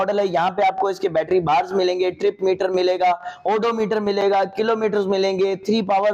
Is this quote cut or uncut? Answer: uncut